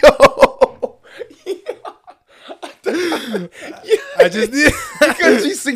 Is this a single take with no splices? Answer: yes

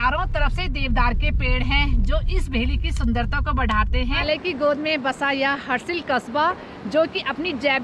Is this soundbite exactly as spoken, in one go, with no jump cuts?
no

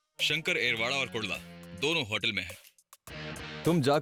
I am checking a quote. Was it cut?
no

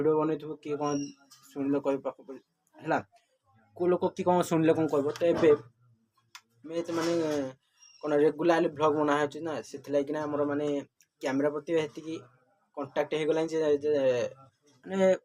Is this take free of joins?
yes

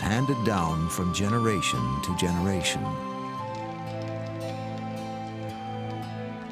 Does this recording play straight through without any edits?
no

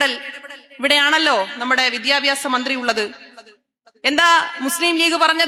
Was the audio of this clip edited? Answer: no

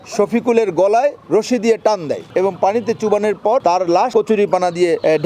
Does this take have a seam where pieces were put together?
yes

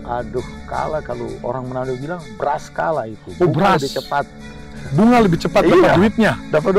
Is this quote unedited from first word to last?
yes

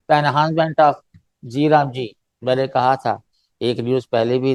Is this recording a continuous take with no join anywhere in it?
yes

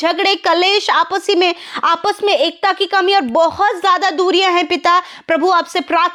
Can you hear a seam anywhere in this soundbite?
no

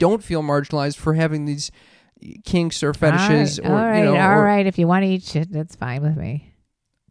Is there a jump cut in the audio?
no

